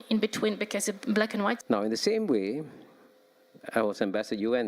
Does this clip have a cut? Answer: yes; 1 cut; at 1.6 s

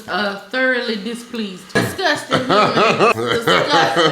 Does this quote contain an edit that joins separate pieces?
yes; 2 cuts; at 1.6 s, 3.1 s

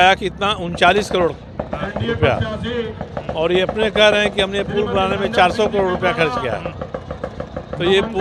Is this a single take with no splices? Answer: yes; 0 cuts

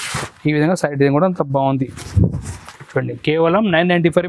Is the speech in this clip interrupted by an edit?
no; 0 cuts

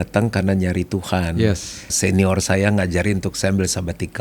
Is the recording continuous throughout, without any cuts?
no; 1 cut; at 1.9 s

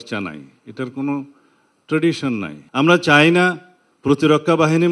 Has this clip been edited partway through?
yes; 1 cut; at 2.6 s

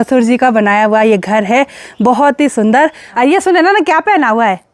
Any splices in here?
yes; 1 cut; at 3.0 s

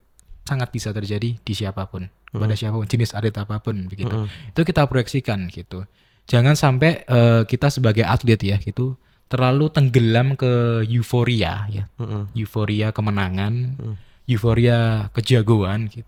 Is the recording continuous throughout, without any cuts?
yes; 0 cuts

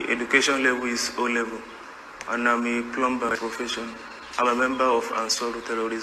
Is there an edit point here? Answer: yes; 1 cut; at 3.4 s

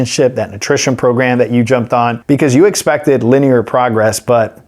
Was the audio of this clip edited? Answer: yes; 1 cut; at 2.2 s

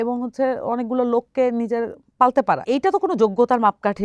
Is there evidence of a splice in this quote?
yes; 1 cut; at 2.6 s

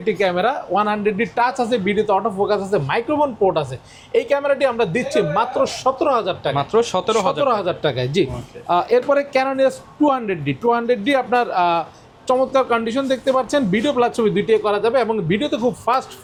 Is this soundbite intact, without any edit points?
yes; 0 cuts

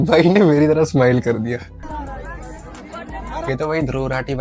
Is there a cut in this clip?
yes; 1 cut; at 1.8 s

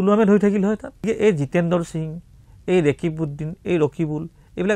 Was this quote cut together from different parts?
yes; 1 cut; at 1.0 s

